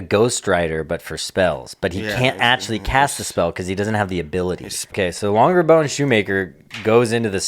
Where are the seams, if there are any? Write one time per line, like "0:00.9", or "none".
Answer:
0:04.8